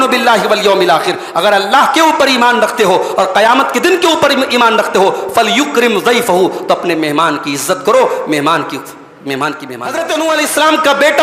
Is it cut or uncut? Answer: cut